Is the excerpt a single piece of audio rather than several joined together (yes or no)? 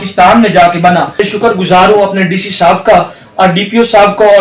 no